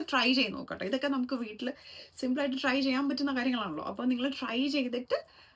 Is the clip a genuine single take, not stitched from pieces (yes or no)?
yes